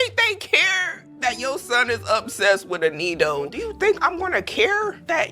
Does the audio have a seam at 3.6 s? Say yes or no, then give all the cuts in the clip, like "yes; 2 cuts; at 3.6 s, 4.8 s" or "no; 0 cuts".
yes; 1 cut; at 3.6 s